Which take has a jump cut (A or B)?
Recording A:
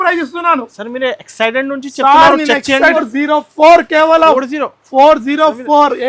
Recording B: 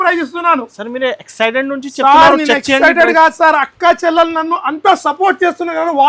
A